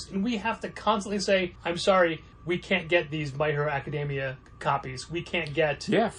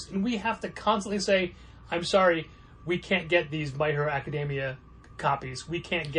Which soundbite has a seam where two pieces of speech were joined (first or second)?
first